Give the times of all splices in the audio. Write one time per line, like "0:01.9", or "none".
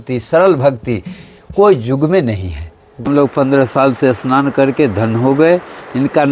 0:03.0